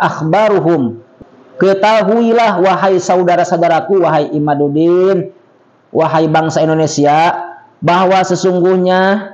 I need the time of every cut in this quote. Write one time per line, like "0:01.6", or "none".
0:01.0